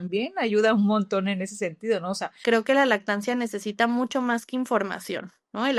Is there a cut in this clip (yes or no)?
yes